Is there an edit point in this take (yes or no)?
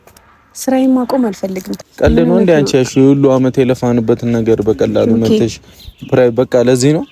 yes